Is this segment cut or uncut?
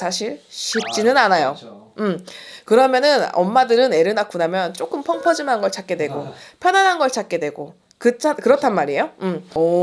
uncut